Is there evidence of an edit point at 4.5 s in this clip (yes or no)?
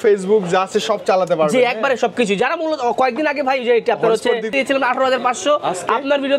yes